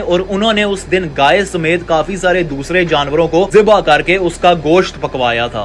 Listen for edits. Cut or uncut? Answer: uncut